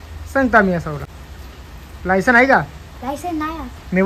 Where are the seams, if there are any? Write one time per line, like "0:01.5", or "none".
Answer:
none